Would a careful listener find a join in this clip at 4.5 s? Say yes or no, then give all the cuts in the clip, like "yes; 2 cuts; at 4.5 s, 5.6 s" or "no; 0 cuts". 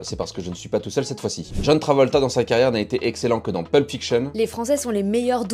yes; 1 cut; at 4.5 s